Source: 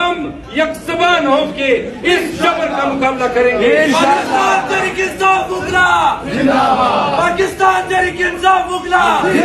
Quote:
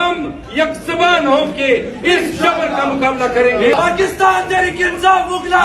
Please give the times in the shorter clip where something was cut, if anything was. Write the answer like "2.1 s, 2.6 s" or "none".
3.7 s